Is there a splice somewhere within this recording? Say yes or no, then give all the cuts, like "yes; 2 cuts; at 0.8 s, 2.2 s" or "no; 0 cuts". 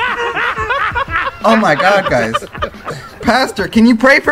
no; 0 cuts